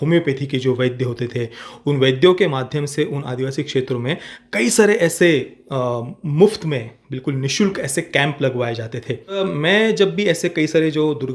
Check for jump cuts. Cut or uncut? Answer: cut